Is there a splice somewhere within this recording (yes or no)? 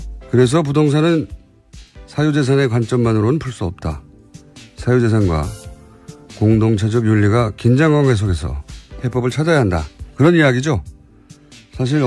yes